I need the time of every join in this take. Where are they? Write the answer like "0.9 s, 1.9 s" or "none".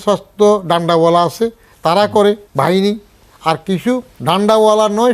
2.5 s, 4.1 s